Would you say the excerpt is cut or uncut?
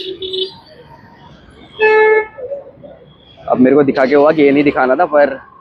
uncut